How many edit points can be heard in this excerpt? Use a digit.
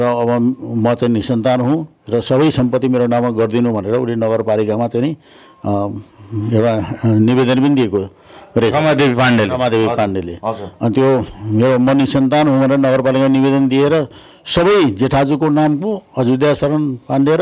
0